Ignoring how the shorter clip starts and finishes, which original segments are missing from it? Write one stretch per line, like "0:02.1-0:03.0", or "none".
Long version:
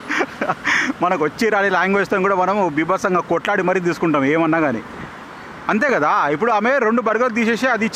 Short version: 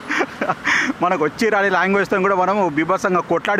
none